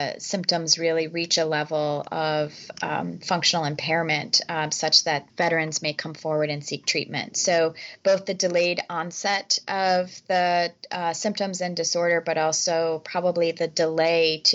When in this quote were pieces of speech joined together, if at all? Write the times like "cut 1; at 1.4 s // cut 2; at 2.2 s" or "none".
cut 1; at 5.3 s